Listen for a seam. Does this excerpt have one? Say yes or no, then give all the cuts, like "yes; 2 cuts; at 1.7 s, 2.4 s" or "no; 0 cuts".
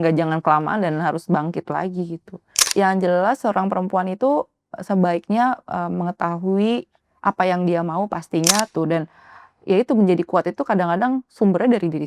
yes; 2 cuts; at 2.7 s, 8.7 s